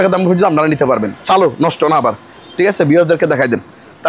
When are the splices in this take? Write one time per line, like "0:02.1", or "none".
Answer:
none